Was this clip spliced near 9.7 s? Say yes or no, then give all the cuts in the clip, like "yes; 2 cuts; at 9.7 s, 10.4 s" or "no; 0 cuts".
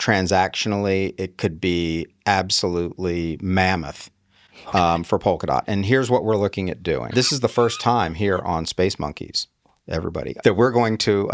no; 1 cut; at 7.0 s